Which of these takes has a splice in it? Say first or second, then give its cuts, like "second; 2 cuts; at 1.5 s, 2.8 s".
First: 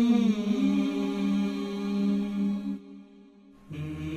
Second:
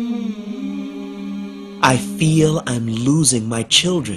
first; 1 cut; at 1.7 s